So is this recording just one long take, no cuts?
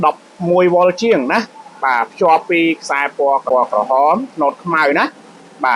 no; 1 cut; at 3.4 s

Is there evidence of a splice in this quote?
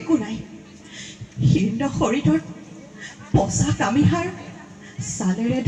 no; 0 cuts

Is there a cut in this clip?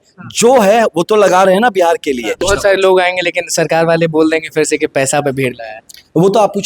yes; 1 cut; at 2.4 s

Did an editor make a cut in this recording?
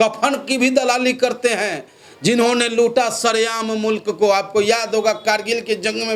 no; 0 cuts

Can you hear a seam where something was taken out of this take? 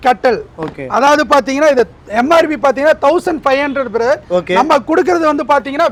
no; 0 cuts

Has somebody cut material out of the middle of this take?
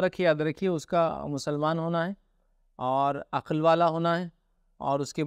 no; 0 cuts

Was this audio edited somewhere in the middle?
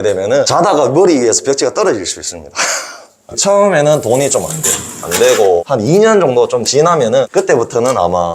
yes; 1 cut; at 3.2 s

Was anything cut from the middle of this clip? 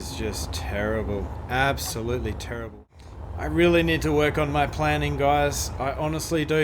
yes; 1 cut; at 2.8 s

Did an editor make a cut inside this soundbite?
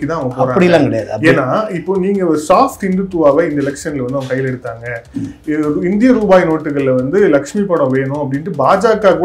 no; 0 cuts

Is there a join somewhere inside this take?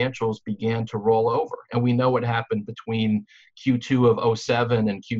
no; 0 cuts

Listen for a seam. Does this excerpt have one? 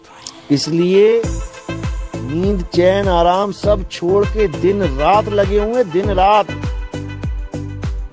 no; 0 cuts

